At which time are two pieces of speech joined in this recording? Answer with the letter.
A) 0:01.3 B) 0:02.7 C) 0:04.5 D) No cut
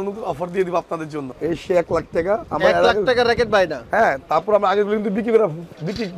A